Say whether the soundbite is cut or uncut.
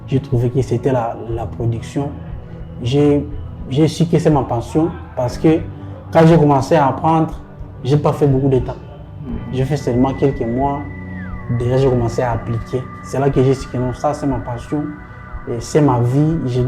uncut